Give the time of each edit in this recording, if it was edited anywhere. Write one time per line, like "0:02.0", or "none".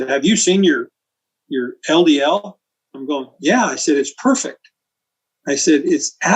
none